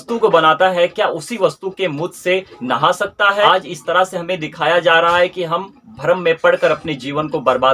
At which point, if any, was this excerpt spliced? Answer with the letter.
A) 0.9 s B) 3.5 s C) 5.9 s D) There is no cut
B